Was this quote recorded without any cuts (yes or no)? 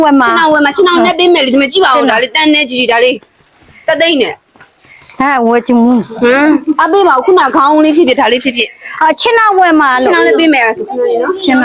yes